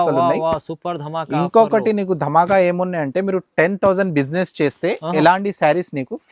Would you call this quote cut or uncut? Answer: uncut